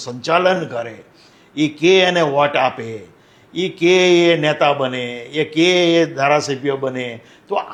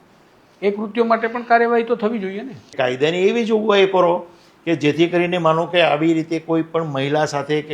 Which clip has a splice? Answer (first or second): second